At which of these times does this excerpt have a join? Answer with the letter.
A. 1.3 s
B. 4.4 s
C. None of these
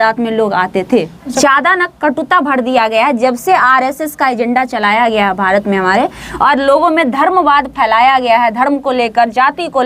A